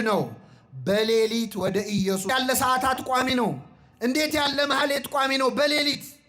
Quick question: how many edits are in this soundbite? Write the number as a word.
one